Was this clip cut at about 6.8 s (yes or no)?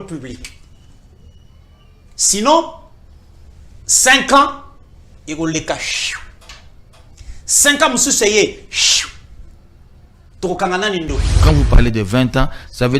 no